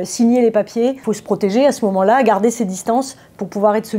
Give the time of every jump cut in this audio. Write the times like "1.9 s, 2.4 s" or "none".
1.1 s